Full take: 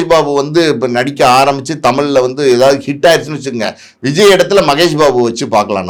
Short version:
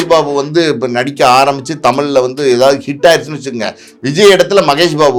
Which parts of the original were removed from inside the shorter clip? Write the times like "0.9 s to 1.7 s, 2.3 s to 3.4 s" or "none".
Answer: none

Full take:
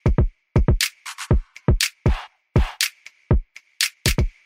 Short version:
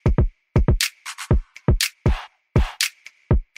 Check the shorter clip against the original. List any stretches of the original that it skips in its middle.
none

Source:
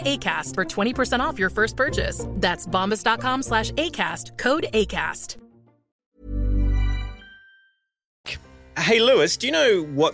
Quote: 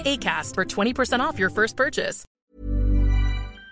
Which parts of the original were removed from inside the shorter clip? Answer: 2.2 s to 5.8 s

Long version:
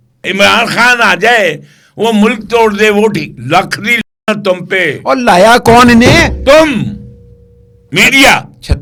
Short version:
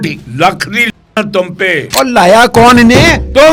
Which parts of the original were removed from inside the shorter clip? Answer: none

